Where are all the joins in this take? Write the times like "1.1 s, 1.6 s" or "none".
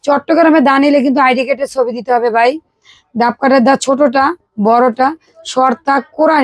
none